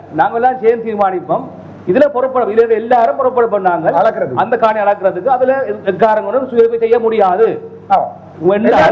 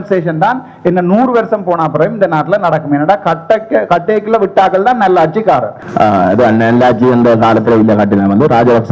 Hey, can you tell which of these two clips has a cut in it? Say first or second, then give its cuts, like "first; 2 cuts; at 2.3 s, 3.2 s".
second; 1 cut; at 5.8 s